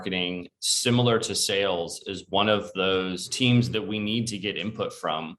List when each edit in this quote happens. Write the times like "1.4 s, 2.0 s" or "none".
3.2 s